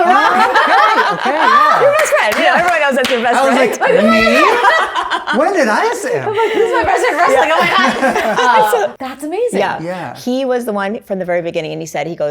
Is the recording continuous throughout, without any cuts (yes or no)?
no